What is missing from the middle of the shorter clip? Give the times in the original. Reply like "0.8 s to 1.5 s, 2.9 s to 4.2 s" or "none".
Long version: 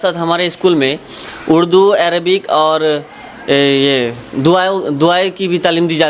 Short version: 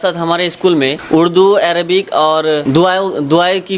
1.0 s to 1.4 s, 3.0 s to 4.3 s

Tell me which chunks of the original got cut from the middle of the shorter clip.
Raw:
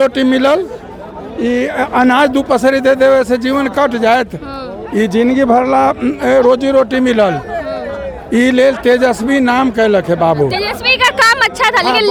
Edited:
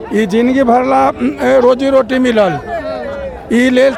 none

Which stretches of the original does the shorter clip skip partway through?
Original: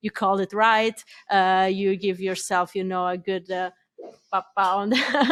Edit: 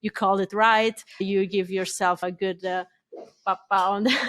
1.2 s to 1.7 s, 2.7 s to 3.1 s

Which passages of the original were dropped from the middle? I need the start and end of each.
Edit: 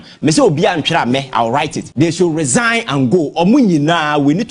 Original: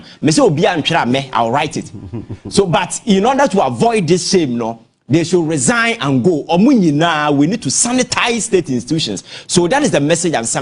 1.8 s to 4.9 s

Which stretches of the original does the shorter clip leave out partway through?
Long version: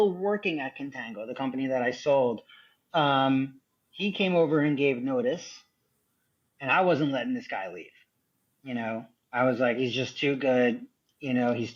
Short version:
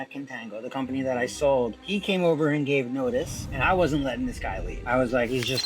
2.4 s to 3.9 s, 5.5 s to 6.5 s, 7.8 s to 9.2 s

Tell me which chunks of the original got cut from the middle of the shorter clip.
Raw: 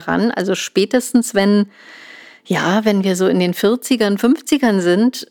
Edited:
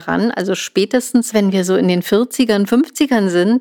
1.3 s to 2.8 s

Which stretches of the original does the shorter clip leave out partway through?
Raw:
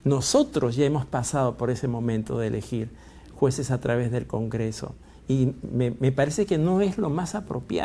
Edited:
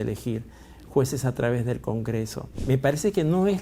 5.1 s to 5.9 s

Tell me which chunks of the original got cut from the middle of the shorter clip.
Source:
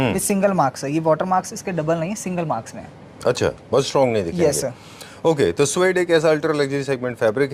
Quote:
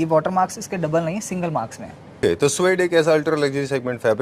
3.1 s to 5.4 s

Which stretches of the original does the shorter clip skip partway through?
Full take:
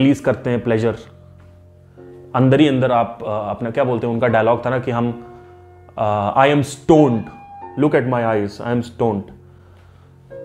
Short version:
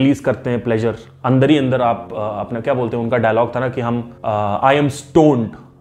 1.1 s to 2.2 s, 5.2 s to 5.9 s

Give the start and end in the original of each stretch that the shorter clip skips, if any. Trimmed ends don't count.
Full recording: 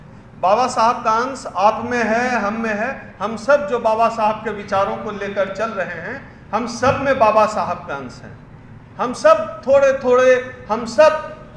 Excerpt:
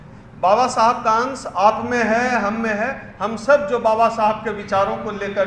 none

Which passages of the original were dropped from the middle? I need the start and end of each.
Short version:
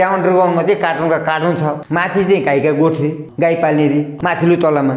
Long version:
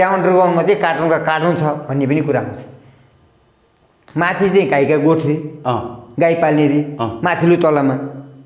1.8 s to 4.1 s, 5.5 s to 6.0 s, 6.9 s to 7.1 s

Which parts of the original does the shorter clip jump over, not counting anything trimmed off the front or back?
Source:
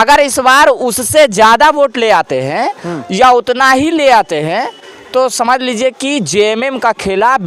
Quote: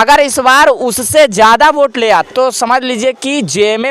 2.3 s to 5.1 s

